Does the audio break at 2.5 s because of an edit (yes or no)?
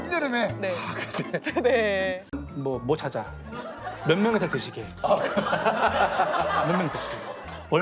yes